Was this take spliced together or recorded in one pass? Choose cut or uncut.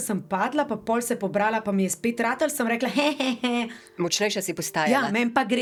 uncut